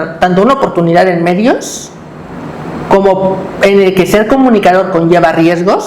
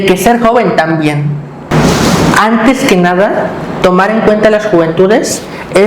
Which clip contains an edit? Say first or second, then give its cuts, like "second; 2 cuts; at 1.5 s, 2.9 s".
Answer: second; 1 cut; at 1.7 s